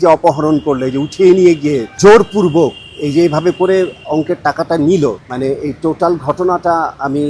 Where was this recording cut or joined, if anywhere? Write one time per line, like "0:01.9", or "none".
0:01.9
0:05.3

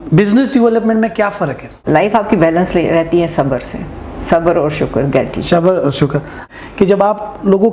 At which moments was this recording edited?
0:01.7
0:06.4

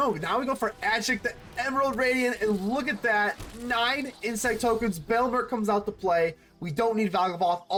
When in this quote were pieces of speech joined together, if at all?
none

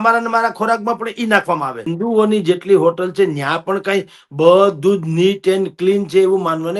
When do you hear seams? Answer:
0:01.9

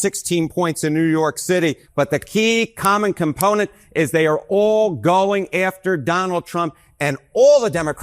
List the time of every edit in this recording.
0:01.8

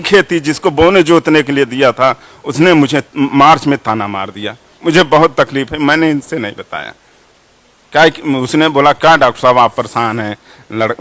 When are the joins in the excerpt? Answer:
none

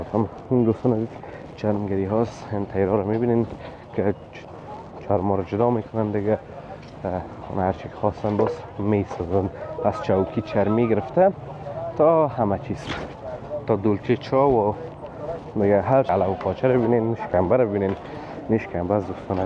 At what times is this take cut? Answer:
0:16.1

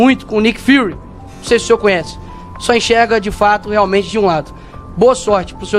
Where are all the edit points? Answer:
none

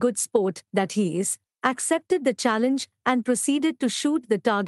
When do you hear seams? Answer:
0:01.4

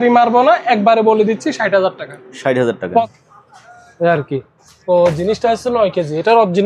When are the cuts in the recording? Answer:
0:03.0

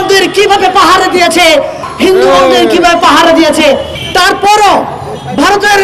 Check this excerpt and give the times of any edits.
0:01.9
0:03.9

